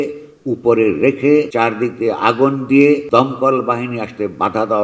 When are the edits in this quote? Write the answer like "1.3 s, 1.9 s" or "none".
1.5 s, 3.0 s